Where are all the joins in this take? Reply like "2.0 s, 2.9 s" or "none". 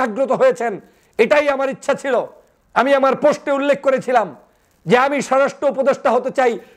none